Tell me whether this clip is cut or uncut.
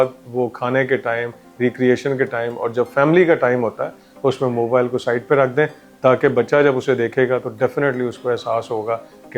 uncut